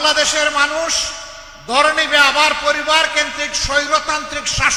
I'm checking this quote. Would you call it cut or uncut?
uncut